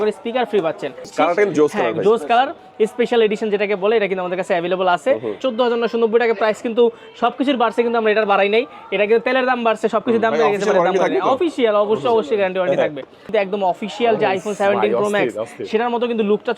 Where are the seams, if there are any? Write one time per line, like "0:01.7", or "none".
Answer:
0:01.1
0:05.4
0:13.3